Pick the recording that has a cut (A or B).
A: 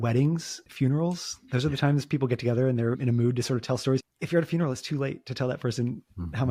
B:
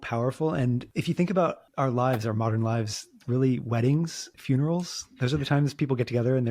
B